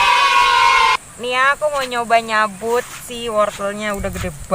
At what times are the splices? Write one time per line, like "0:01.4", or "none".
0:01.0